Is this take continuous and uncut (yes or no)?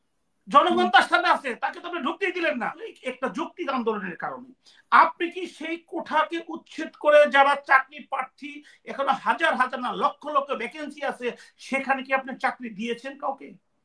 no